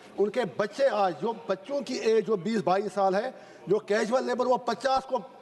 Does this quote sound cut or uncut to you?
uncut